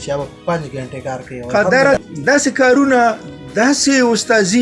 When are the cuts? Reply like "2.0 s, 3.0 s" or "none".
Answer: 2.0 s

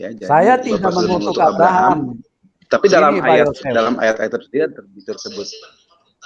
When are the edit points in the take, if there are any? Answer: none

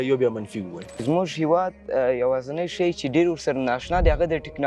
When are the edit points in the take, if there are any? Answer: 0.9 s

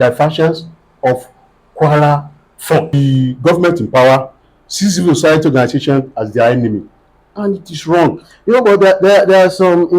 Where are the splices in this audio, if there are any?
2.9 s

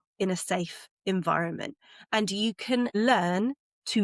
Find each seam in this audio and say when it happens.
2.9 s

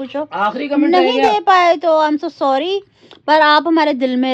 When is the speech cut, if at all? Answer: 3.4 s

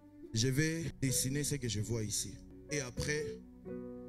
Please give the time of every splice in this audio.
0.9 s, 2.6 s

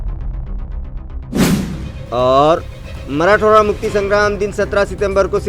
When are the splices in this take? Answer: 1.7 s

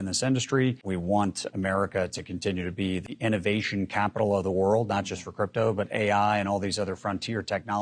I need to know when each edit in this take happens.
0.8 s, 3.0 s

